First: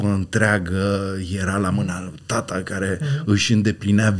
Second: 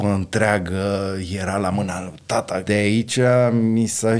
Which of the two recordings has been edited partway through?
second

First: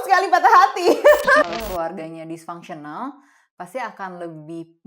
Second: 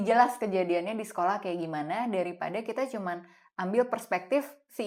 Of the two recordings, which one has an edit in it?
first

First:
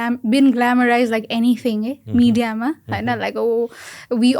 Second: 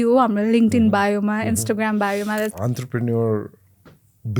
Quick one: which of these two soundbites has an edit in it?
second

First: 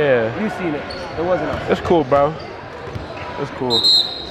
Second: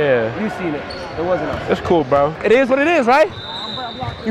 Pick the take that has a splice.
second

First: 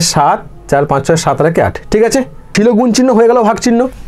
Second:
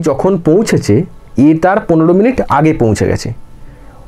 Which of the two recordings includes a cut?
first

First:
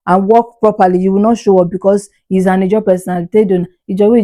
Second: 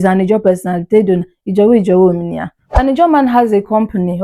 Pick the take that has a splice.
second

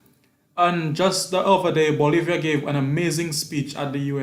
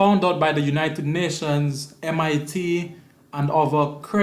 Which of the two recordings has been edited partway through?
second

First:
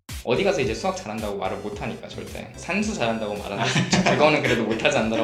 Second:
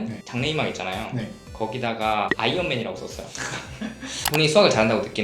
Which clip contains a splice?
second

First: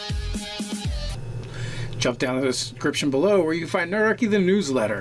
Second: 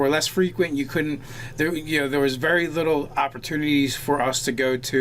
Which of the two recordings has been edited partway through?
second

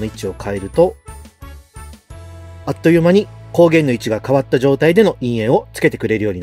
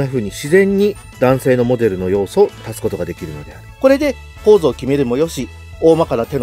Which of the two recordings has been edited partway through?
second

